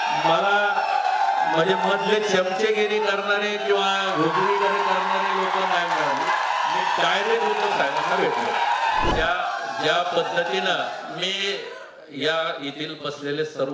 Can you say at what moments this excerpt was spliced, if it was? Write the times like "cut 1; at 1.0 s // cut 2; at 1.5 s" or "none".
cut 1; at 9.1 s